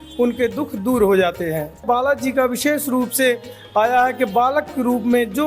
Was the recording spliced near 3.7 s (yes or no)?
no